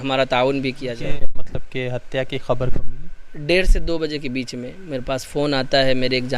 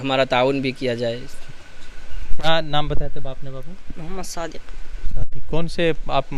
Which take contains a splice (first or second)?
first